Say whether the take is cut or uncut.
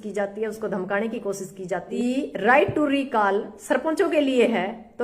cut